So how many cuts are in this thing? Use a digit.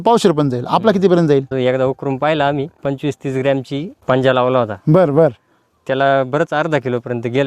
3